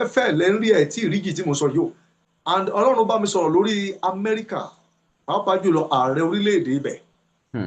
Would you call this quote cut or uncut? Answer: cut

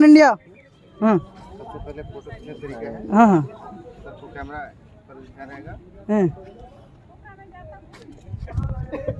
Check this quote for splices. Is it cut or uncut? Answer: uncut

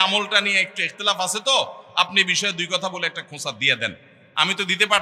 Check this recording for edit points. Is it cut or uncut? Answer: uncut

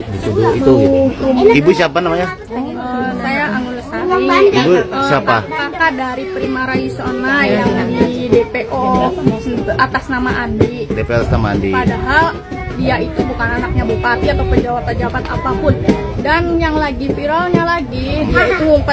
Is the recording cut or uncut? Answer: uncut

